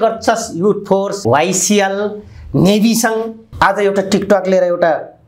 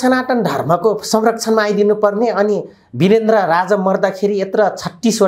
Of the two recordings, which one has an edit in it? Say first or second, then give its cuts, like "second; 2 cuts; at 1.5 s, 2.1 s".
first; 2 cuts; at 1.2 s, 3.5 s